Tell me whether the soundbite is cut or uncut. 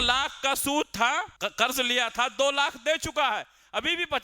cut